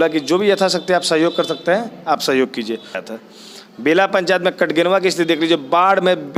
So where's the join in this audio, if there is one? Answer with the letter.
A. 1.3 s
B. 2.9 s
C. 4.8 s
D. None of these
B